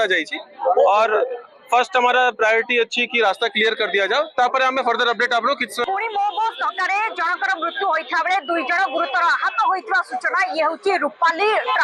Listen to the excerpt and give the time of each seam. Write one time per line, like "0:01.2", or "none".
0:05.8